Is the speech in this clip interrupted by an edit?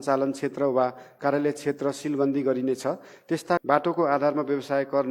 yes; 1 cut; at 3.6 s

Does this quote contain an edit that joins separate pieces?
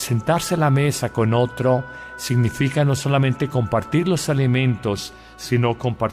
yes; 1 cut; at 2.4 s

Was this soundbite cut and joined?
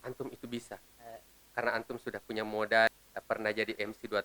yes; 1 cut; at 2.9 s

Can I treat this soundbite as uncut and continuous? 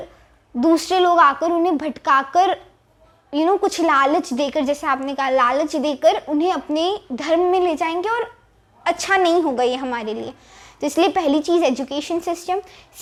yes; 0 cuts

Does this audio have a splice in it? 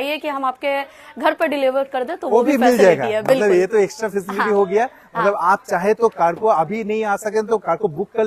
no; 0 cuts

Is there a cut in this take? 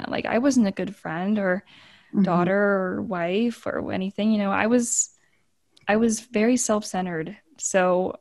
no; 0 cuts

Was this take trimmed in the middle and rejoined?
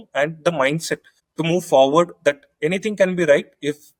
no; 0 cuts

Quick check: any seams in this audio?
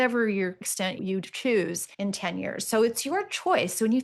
yes; 2 cuts; at 1.0 s, 1.8 s

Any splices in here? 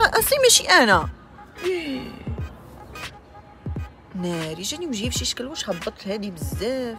no; 0 cuts

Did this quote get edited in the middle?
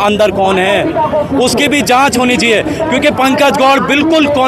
no; 0 cuts

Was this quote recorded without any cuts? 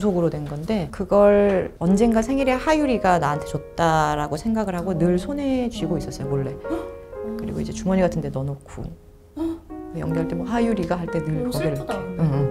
yes; 0 cuts

